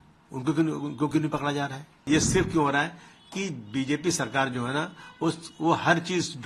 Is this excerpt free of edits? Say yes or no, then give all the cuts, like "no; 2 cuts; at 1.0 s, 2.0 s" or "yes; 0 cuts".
no; 1 cut; at 2.0 s